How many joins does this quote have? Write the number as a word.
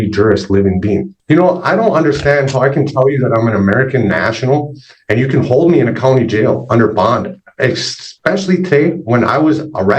one